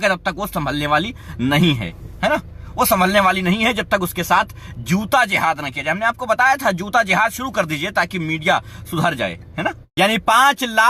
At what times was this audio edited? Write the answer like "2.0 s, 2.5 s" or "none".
9.8 s